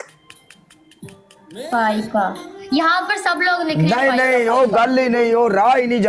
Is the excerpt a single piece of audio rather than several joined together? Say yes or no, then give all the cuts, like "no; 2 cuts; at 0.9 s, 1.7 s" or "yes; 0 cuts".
yes; 0 cuts